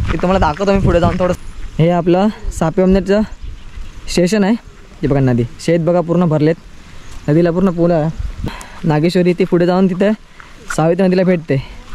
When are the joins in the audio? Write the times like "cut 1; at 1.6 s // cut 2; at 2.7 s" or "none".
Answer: cut 1; at 1.4 s // cut 2; at 8.5 s